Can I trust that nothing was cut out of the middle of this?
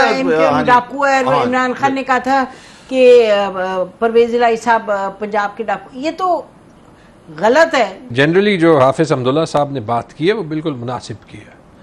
no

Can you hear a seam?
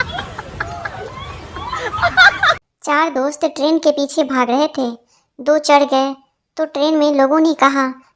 no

